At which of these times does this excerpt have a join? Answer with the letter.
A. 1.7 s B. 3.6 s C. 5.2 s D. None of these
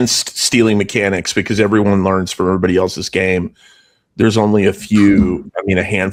D